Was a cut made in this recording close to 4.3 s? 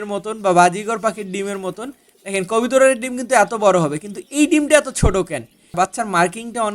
no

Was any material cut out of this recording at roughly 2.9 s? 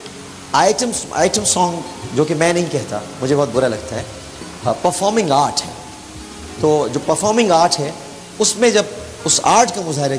yes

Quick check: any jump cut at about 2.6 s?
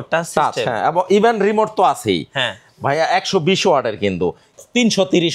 no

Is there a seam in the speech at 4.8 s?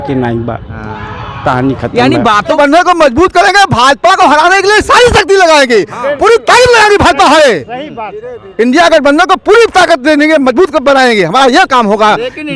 no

